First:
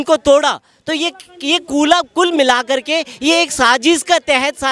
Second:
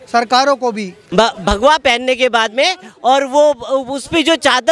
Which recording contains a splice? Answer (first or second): second